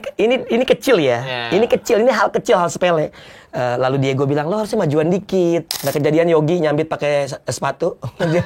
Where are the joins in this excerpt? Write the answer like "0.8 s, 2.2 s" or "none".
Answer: 5.8 s